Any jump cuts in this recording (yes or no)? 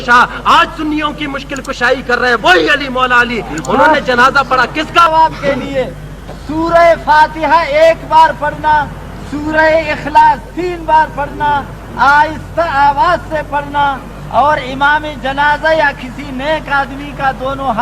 yes